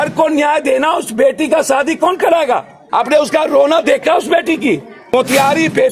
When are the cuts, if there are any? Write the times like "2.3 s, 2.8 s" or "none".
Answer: 2.8 s, 4.9 s